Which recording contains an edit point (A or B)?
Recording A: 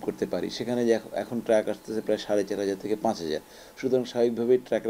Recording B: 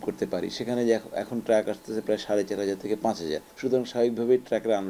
B